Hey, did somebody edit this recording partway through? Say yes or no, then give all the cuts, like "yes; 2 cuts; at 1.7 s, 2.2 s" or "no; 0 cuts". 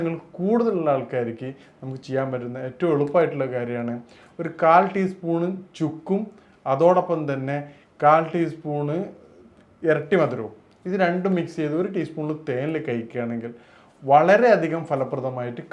no; 0 cuts